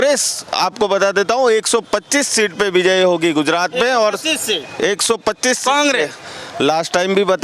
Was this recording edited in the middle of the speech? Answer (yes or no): no